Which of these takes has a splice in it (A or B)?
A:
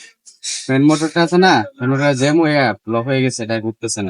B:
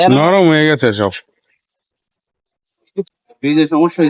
B